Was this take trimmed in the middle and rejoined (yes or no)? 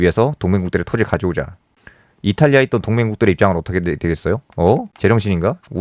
yes